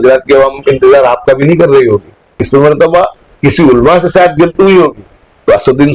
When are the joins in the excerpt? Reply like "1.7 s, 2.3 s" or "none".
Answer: 2.4 s